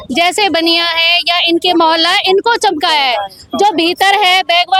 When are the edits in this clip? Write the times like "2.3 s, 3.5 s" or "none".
none